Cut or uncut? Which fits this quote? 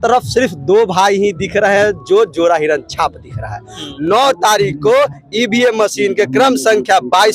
cut